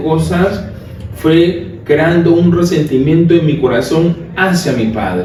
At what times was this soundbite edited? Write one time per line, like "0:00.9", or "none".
none